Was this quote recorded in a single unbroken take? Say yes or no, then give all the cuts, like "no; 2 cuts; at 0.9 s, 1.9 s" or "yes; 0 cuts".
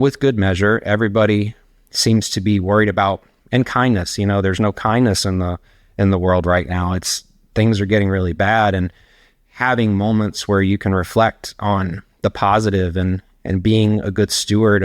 no; 1 cut; at 3.4 s